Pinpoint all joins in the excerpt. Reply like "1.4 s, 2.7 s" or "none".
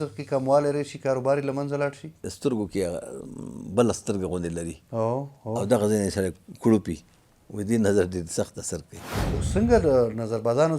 2.2 s, 9.2 s